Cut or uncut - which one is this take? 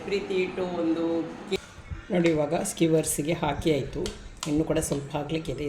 cut